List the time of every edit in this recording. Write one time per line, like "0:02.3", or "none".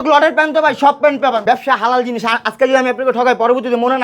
0:01.4